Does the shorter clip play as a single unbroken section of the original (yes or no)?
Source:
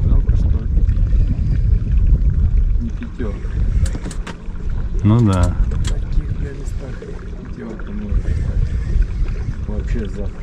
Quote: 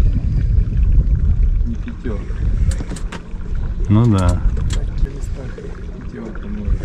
no